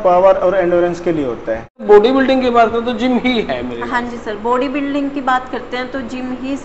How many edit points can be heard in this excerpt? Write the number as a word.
one